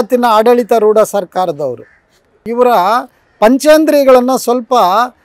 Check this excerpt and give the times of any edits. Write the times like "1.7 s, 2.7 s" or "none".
2.5 s